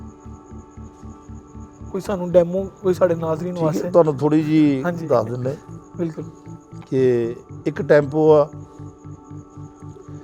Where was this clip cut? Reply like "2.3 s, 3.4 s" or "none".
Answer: none